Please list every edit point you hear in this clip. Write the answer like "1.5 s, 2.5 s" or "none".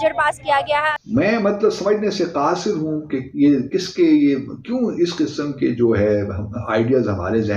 0.9 s